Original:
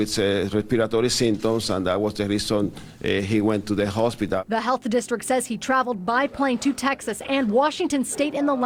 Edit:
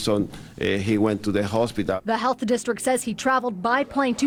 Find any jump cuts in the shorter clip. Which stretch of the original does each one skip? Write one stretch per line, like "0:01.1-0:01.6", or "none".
none